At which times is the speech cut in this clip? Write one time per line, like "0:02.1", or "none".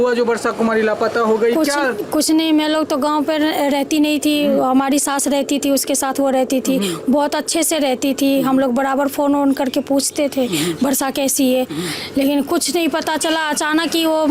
none